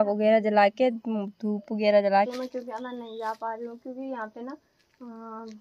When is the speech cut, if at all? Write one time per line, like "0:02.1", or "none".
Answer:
0:02.3